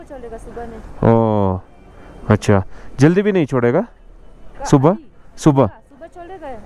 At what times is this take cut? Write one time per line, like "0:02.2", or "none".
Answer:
none